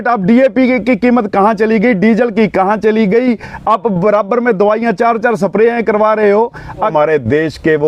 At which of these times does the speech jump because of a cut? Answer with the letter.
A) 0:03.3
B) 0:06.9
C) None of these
B